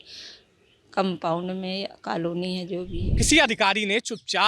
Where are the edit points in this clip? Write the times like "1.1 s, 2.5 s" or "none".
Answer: 3.0 s